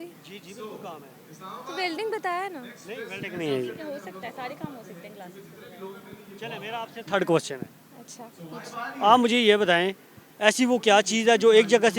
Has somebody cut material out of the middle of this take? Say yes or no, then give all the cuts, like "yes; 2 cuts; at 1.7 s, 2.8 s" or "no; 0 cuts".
no; 0 cuts